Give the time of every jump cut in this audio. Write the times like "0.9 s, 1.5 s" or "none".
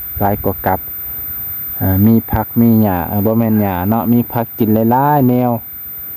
none